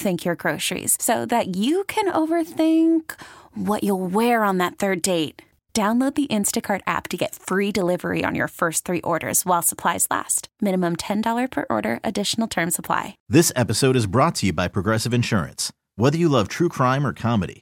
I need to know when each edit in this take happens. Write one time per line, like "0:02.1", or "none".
0:13.2